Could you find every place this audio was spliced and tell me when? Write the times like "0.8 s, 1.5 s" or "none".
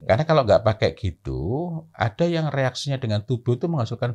none